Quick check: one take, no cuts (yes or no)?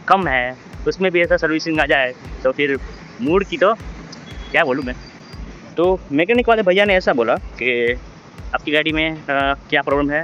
yes